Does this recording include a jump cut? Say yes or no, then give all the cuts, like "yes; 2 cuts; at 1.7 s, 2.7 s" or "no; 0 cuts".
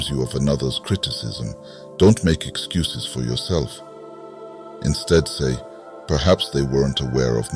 no; 0 cuts